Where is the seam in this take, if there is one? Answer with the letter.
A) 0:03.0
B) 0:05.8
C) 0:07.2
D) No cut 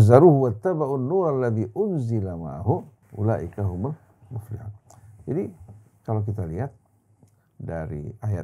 A